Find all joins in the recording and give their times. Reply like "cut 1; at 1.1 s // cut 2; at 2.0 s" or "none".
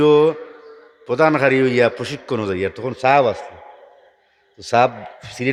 none